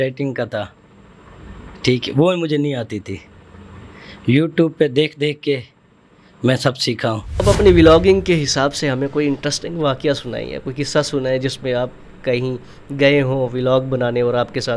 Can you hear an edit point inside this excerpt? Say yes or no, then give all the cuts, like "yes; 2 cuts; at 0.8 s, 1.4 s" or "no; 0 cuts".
yes; 1 cut; at 7.4 s